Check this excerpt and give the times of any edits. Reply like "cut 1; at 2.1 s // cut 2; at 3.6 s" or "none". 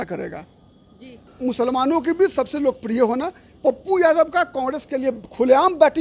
cut 1; at 1.3 s